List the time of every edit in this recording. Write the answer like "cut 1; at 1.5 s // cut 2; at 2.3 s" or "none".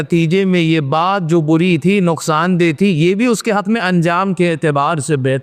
none